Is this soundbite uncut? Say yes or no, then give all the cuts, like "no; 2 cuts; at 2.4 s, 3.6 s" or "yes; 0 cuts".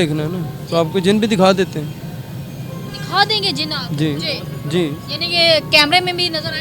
yes; 0 cuts